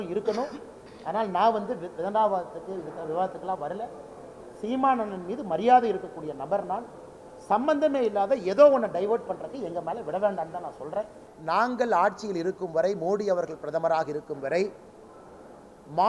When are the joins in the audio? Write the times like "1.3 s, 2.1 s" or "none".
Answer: 11.3 s